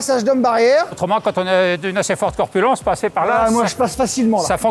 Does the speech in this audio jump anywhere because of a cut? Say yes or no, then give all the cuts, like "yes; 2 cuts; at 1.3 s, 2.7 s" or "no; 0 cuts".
yes; 1 cut; at 1.0 s